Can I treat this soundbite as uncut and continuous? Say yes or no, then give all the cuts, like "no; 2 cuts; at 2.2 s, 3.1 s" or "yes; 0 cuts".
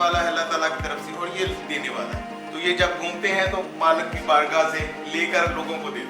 yes; 0 cuts